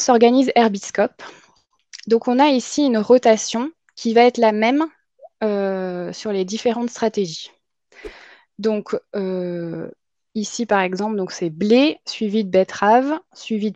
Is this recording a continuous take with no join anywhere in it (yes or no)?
yes